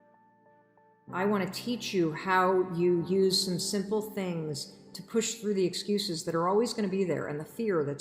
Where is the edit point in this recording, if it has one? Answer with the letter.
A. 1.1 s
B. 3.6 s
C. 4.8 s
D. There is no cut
A